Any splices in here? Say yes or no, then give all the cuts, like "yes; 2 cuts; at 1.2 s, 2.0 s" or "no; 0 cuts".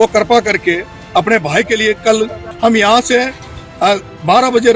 yes; 1 cut; at 2.4 s